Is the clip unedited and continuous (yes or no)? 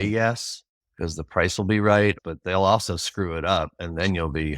no